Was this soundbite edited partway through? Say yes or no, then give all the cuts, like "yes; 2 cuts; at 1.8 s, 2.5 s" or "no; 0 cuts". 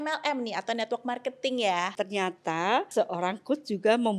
yes; 2 cuts; at 1.9 s, 2.9 s